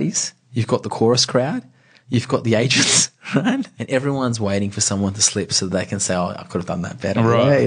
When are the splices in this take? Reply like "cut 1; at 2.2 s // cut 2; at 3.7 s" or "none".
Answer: cut 1; at 3.7 s